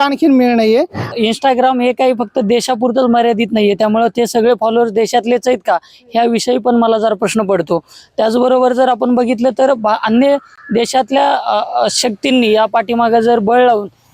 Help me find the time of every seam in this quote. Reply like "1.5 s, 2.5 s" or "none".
1.1 s